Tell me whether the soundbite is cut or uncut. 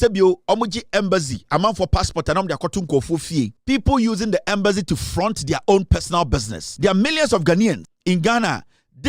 cut